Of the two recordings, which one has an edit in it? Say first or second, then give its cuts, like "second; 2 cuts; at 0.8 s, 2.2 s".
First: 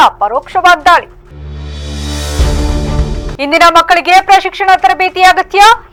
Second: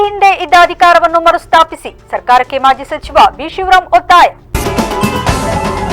second; 1 cut; at 4.5 s